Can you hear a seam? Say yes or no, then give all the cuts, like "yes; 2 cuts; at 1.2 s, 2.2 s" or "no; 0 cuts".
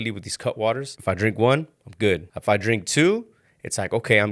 yes; 2 cuts; at 0.9 s, 2.3 s